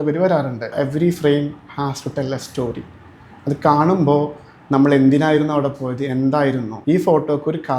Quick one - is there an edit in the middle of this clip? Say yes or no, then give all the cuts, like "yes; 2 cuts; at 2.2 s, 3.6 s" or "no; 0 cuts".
yes; 2 cuts; at 0.7 s, 6.7 s